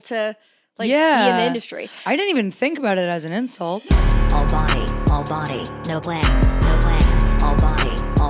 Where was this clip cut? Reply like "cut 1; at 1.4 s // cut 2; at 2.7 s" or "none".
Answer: cut 1; at 3.8 s